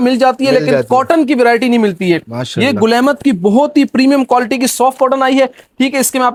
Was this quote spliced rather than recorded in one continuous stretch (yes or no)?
no